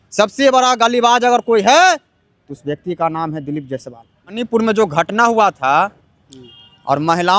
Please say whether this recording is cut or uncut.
cut